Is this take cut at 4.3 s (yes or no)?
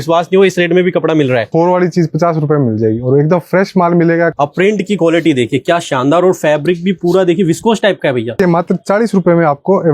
yes